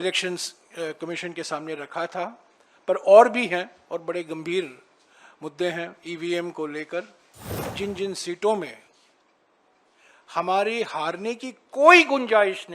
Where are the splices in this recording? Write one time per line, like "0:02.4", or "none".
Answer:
0:07.6